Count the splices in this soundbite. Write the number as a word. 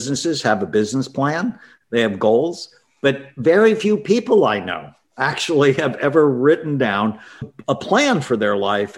zero